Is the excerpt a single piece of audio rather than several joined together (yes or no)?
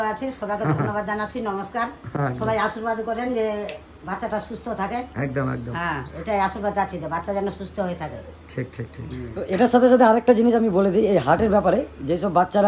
yes